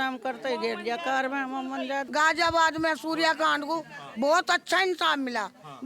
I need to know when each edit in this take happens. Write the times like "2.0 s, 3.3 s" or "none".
2.1 s

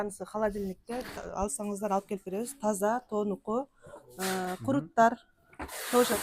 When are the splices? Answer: none

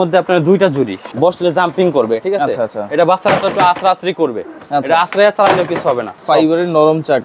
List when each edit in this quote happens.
1.0 s, 6.1 s

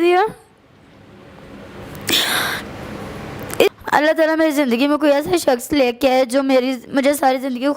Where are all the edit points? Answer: 3.7 s

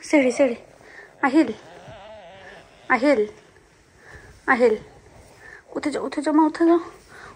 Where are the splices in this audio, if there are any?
none

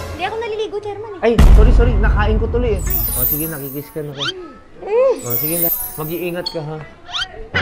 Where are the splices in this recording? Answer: 3.1 s, 5.7 s

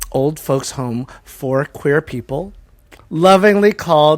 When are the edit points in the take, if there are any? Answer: none

